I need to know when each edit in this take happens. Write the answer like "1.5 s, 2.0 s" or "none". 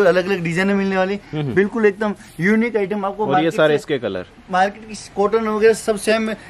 none

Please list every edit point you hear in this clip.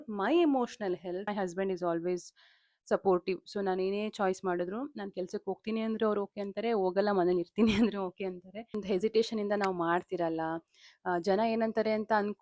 1.3 s, 8.8 s

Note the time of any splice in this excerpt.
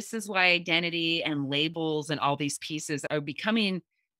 3.0 s

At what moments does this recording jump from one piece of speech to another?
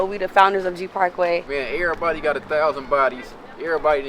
1.4 s

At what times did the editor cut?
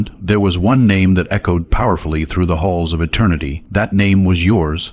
3.6 s

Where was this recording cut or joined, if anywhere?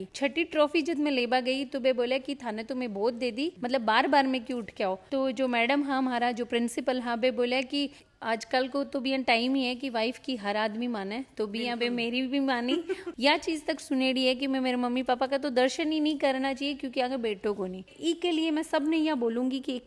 7.9 s, 13.1 s, 17.9 s

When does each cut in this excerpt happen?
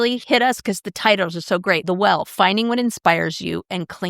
1.8 s

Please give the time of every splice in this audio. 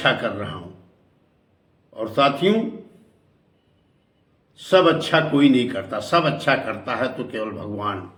none

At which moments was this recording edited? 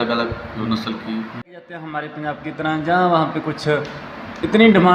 1.9 s

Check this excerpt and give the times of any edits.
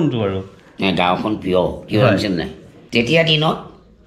2.8 s

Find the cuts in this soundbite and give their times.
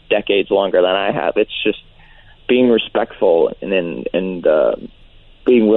none

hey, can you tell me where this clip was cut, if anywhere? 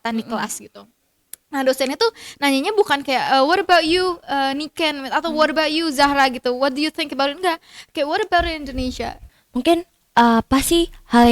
9.3 s

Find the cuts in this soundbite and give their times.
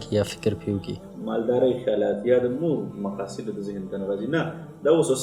0.9 s

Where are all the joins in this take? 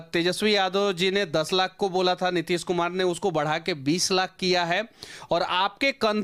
none

